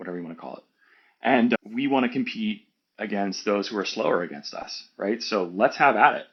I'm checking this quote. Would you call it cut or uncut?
uncut